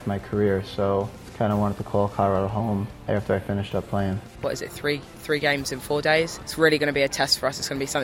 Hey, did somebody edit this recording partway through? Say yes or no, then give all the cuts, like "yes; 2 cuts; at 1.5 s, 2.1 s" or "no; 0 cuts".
yes; 4 cuts; at 1.2 s, 3.0 s, 4.3 s, 6.4 s